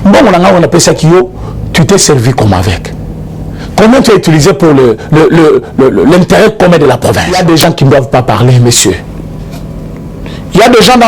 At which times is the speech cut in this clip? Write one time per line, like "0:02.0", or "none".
0:07.2

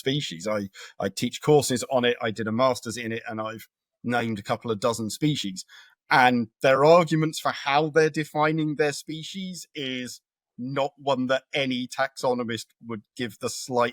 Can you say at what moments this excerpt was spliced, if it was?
none

